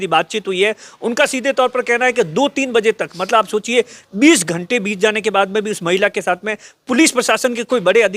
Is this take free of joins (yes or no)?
yes